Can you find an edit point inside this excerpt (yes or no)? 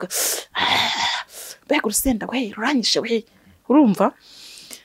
no